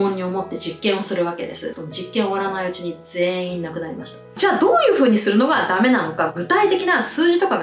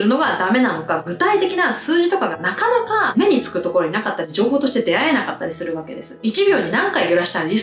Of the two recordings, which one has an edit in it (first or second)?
first